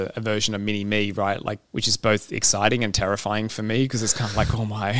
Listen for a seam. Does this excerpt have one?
yes; 1 cut; at 1.7 s

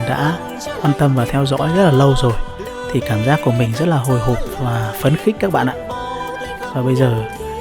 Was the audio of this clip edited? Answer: no; 0 cuts

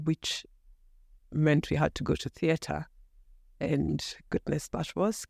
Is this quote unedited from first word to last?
yes; 0 cuts

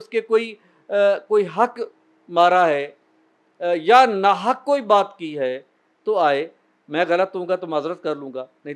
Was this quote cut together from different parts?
no; 0 cuts

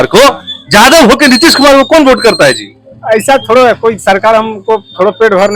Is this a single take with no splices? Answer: yes; 0 cuts

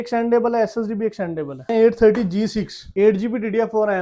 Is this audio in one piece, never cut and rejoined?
no; 2 cuts; at 1.7 s, 2.8 s

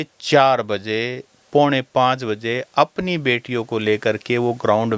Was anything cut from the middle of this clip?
no; 0 cuts

